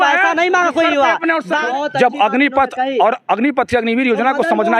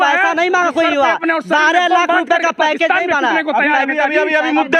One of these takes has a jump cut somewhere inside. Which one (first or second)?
first